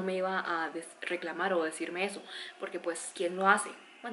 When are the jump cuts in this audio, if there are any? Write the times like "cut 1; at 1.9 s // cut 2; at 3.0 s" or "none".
none